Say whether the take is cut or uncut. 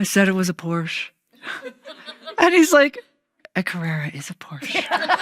uncut